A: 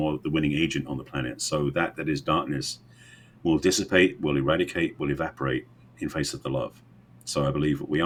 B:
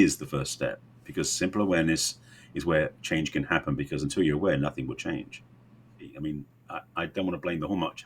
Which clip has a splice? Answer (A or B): B